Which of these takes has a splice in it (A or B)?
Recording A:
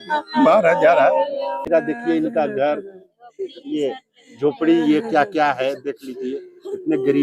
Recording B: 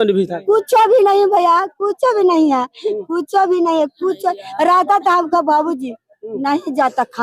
A